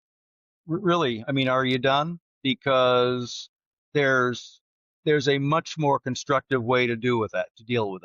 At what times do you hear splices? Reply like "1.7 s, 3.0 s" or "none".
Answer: none